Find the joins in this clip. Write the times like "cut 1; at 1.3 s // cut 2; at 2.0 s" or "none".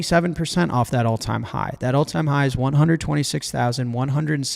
none